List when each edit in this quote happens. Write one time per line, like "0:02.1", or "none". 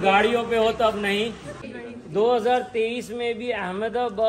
0:01.5